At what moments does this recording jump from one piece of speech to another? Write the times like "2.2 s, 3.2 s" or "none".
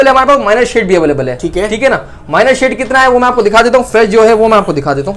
none